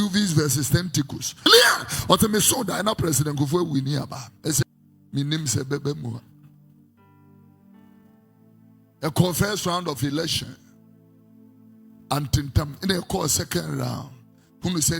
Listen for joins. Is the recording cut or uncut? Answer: cut